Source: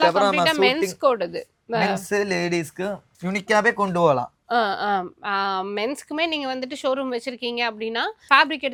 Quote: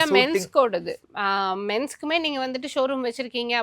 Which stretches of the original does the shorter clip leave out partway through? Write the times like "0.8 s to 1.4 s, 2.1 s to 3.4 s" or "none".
1.6 s to 5.2 s